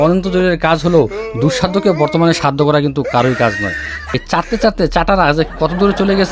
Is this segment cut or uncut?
cut